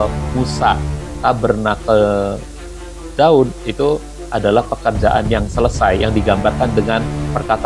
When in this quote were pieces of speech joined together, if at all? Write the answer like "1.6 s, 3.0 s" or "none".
1.0 s